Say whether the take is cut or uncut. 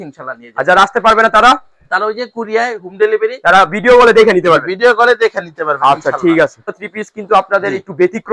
cut